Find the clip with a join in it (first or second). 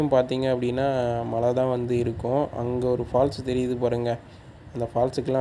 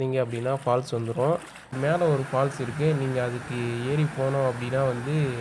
second